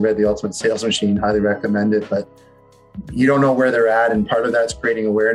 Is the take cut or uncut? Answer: uncut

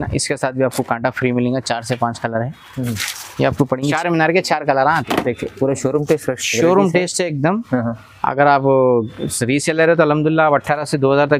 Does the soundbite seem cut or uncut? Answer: cut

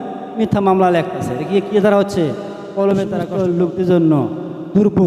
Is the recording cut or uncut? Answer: cut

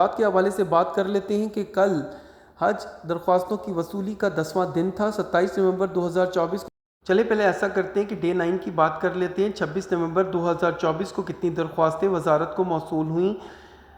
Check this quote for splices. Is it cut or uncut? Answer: uncut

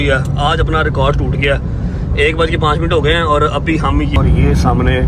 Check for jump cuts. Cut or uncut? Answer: cut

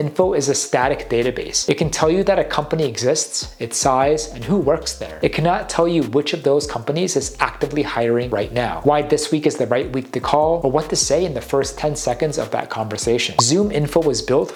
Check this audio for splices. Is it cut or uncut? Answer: uncut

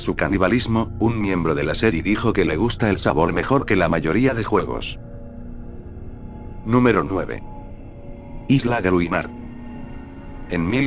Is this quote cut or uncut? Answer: cut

